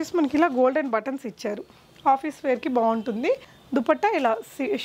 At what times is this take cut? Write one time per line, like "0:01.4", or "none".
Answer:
0:03.5